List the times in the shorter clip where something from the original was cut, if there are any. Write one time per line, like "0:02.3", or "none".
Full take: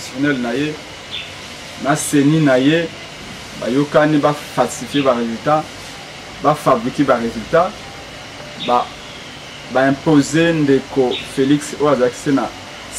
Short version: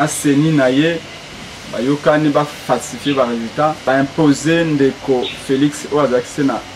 0:03.8